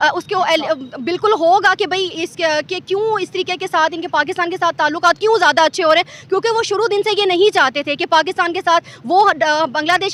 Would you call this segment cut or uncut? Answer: uncut